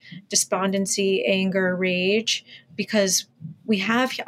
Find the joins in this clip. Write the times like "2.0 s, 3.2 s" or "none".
none